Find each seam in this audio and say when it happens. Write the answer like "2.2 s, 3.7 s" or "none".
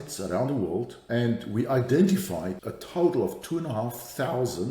1.0 s, 2.5 s